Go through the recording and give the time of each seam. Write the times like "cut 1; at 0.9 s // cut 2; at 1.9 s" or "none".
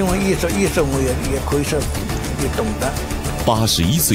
none

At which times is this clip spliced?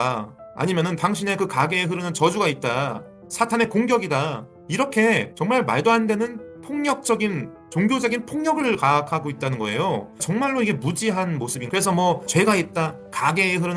cut 1; at 11.6 s

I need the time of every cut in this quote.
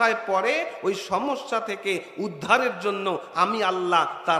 none

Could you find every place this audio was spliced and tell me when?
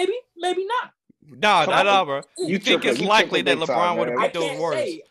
none

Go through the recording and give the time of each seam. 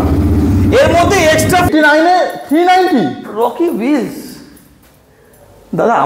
cut 1; at 1.7 s

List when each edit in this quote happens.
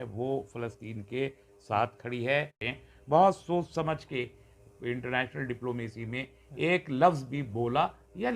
cut 1; at 2.6 s

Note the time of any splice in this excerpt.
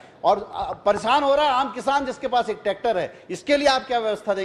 none

